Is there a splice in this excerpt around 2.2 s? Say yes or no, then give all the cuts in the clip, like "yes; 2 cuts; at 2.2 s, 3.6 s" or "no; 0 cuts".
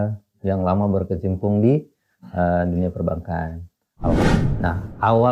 no; 1 cut; at 4.2 s